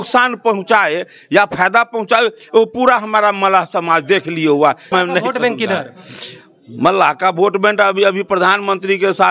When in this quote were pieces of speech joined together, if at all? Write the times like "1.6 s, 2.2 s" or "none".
4.9 s